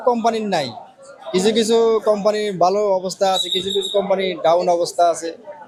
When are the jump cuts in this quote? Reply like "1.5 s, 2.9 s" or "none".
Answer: none